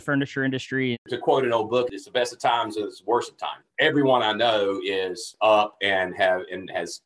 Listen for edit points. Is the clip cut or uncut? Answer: cut